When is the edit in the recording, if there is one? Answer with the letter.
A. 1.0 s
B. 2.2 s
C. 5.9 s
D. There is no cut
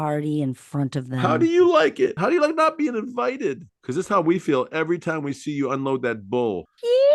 B